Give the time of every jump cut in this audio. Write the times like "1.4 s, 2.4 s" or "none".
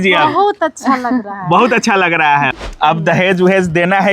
2.6 s